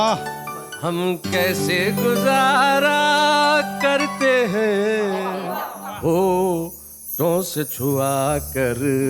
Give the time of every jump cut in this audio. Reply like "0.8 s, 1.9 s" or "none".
none